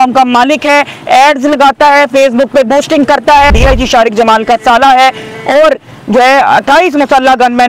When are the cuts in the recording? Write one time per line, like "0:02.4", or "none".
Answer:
0:03.6

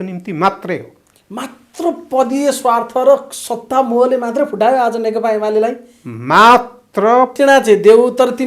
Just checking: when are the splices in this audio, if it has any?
0:07.3

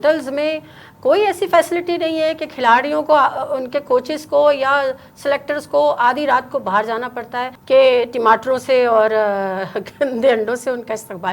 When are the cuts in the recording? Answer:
0:07.5

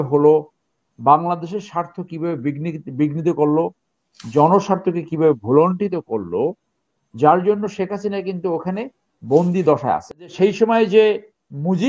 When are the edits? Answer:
0:10.2

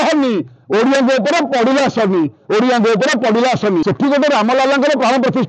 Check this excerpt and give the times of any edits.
0:03.8

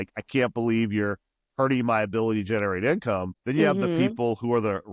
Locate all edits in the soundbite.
0:03.3

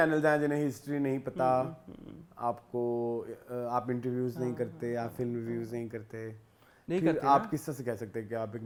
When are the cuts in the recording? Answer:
none

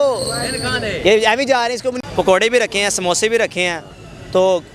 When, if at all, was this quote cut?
0:02.1

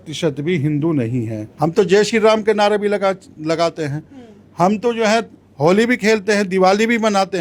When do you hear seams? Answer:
0:01.4

